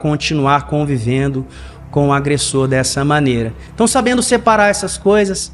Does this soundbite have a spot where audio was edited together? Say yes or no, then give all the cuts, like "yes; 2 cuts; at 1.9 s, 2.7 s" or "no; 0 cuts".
no; 0 cuts